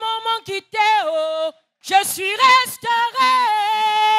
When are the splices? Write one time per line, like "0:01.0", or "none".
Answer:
0:01.7